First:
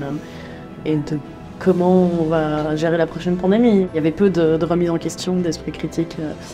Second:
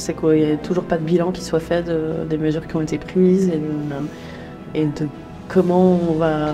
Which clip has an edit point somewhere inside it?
first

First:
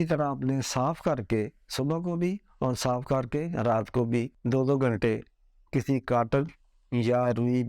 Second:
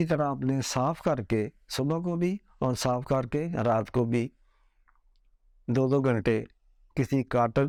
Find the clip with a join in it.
first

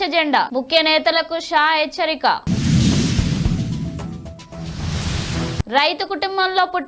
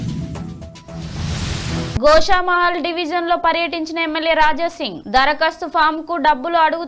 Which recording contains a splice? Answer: second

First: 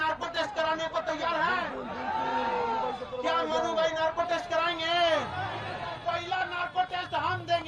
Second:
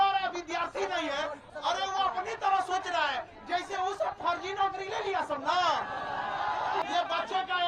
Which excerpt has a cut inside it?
second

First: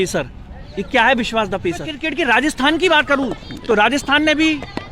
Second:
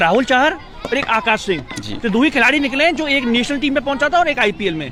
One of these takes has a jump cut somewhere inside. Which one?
first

